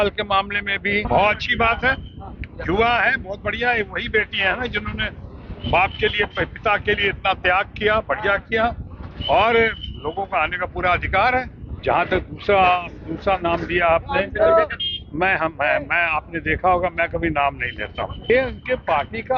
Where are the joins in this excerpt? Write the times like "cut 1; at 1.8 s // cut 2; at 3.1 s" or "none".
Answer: cut 1; at 1.1 s // cut 2; at 11.6 s // cut 3; at 18.3 s